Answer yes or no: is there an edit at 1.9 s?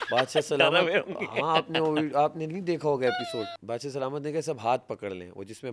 no